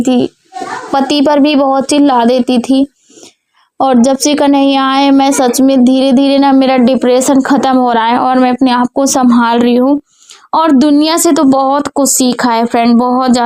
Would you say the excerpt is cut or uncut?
uncut